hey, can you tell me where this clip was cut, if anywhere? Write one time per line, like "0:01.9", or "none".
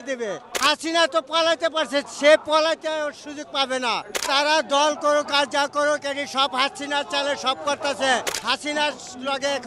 0:04.2
0:08.3

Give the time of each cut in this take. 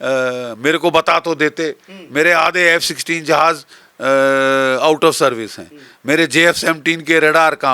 none

